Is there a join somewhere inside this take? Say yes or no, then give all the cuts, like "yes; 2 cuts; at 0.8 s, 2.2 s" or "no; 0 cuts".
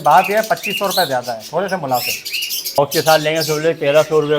yes; 1 cut; at 2.8 s